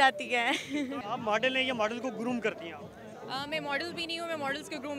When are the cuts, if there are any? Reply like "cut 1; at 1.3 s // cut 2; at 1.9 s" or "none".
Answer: cut 1; at 1.0 s